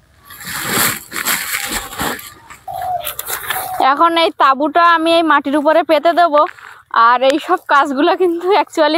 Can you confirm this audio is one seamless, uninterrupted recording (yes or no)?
no